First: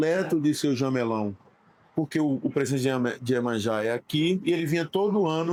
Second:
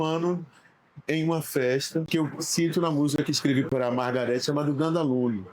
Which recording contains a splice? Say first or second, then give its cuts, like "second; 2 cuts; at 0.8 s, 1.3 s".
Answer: second; 1 cut; at 2.1 s